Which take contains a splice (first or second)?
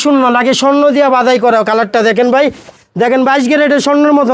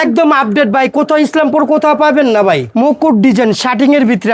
second